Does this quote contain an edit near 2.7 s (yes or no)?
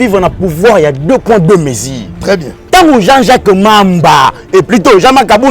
yes